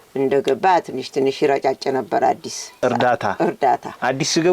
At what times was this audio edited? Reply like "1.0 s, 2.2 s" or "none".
2.8 s